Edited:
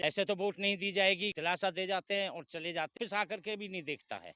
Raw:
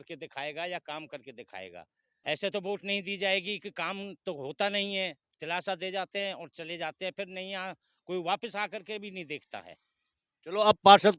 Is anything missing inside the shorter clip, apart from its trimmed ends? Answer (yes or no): yes